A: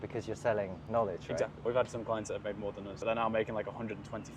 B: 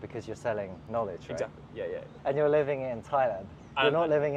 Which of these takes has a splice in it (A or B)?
A